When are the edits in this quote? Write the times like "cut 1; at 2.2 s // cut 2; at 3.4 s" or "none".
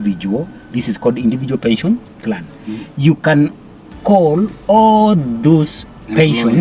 none